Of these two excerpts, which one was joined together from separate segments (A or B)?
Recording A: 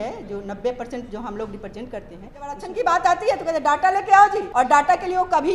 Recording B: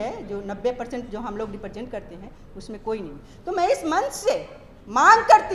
A